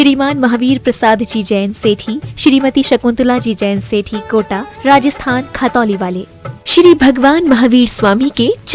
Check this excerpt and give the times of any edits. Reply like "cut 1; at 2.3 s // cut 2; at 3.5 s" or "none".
none